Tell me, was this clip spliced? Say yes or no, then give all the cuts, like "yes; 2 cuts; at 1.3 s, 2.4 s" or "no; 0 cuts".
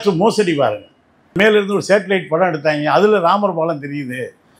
yes; 1 cut; at 1.4 s